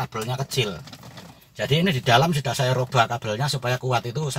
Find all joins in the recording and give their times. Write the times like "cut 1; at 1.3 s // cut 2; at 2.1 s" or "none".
none